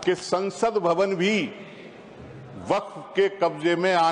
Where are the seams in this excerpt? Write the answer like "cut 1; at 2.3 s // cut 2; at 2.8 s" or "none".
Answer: none